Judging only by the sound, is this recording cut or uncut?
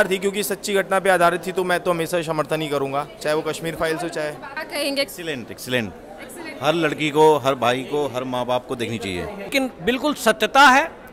cut